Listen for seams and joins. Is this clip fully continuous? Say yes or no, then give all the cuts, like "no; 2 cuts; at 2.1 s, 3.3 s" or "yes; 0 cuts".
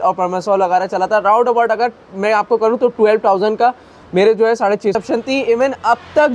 no; 1 cut; at 5.0 s